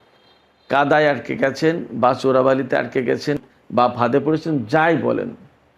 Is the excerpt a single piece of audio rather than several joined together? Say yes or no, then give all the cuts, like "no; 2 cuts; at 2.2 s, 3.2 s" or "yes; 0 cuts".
no; 1 cut; at 3.4 s